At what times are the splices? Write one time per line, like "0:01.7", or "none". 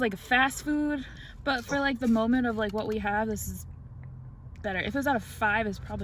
0:01.2